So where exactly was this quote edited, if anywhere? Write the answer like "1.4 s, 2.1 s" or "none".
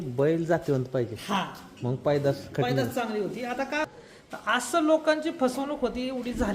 3.8 s